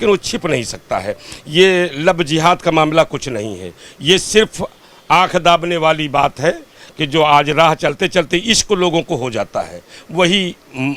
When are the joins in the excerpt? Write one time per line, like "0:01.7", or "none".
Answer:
none